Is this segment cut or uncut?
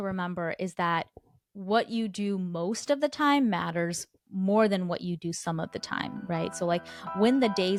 uncut